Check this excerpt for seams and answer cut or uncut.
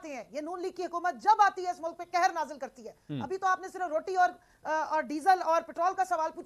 uncut